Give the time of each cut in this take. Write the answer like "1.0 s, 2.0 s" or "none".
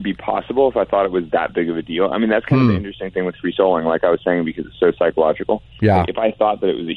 none